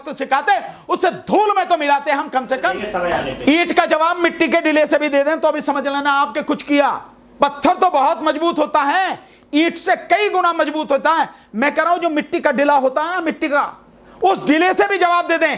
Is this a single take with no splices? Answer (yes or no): no